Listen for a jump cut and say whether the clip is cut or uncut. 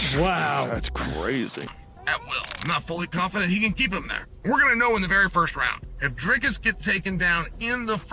cut